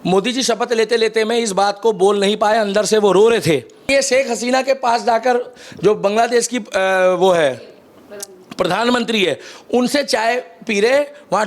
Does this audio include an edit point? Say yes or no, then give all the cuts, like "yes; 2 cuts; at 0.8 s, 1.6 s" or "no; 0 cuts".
yes; 1 cut; at 3.8 s